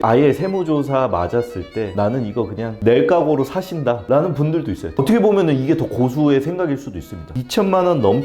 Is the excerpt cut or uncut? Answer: cut